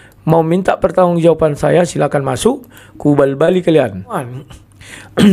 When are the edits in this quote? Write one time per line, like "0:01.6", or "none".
0:04.3